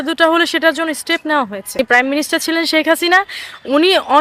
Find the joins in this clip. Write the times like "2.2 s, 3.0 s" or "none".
1.8 s